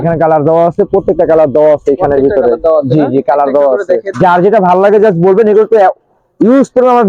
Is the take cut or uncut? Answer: cut